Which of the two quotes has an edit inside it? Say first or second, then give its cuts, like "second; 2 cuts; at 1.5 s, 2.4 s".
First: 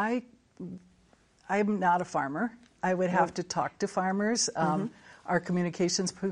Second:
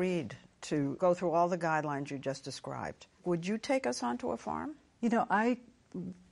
second; 2 cuts; at 1.0 s, 3.2 s